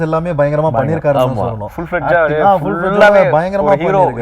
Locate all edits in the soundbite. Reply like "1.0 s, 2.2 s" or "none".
none